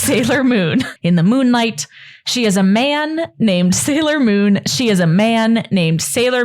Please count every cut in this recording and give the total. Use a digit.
1